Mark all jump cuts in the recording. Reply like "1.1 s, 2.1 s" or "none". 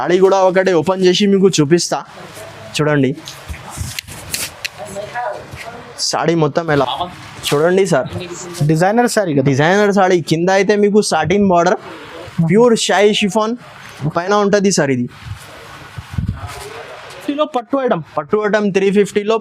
6.8 s, 17.2 s